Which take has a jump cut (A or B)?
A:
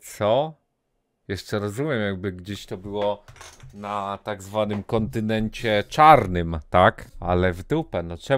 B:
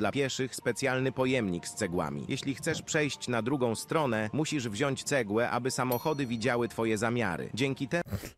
A